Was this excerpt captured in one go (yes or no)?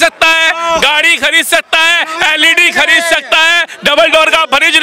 yes